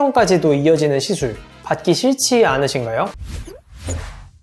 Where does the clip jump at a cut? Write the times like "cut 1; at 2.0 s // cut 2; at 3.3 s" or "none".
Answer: cut 1; at 3.2 s